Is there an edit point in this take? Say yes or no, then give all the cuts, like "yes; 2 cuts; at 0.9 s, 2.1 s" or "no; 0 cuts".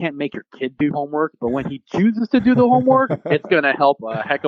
no; 0 cuts